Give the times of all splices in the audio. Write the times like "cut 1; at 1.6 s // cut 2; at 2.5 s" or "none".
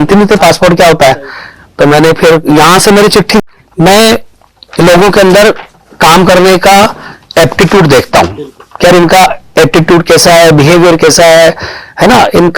cut 1; at 3.4 s